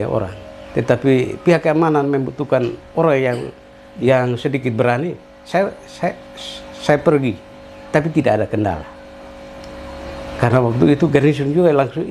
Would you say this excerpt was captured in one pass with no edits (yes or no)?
yes